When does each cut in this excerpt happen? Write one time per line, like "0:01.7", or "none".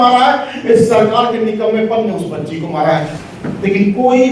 0:03.1